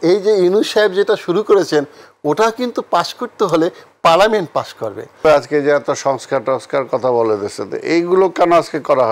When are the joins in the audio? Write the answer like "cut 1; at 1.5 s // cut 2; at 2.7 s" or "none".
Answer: cut 1; at 5.2 s